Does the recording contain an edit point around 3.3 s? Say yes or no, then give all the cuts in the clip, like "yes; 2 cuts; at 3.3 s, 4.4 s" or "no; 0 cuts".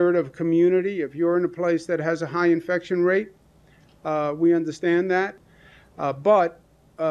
no; 1 cut; at 5.4 s